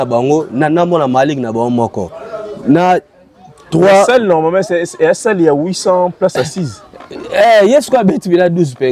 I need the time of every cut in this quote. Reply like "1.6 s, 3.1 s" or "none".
none